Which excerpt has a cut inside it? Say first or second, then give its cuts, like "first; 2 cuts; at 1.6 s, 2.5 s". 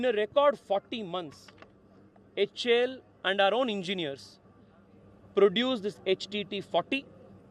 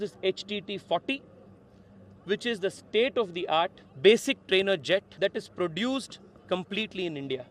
second; 2 cuts; at 3.8 s, 5.1 s